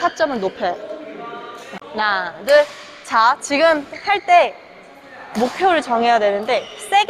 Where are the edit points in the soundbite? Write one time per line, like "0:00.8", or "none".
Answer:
0:01.8